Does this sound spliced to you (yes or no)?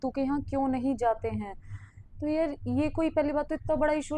no